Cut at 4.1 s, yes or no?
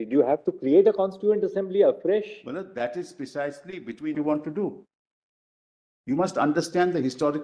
yes